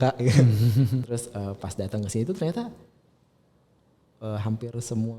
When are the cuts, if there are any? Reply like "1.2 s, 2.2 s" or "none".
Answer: 1.0 s